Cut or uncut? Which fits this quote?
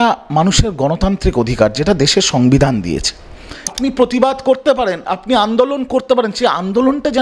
cut